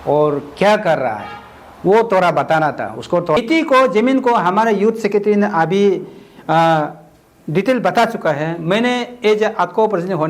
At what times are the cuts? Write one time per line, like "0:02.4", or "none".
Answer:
0:03.4